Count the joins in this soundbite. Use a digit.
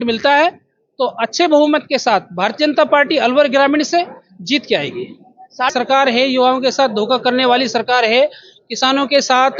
1